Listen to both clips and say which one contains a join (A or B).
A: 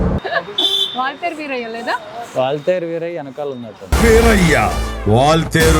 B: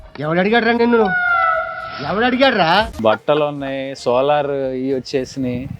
B